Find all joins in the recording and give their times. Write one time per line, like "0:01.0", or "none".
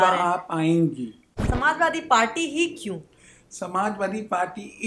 0:01.2